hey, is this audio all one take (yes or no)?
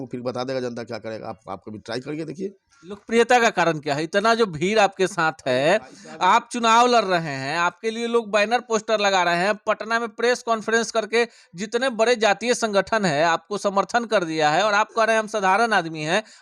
yes